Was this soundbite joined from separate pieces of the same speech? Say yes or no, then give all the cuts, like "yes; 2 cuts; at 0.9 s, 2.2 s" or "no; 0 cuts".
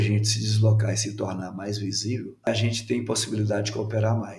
yes; 1 cut; at 2.5 s